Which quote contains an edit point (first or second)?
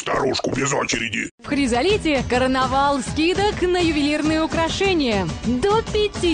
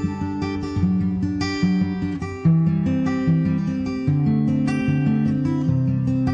first